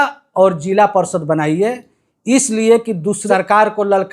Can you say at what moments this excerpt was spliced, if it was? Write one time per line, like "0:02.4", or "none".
0:03.2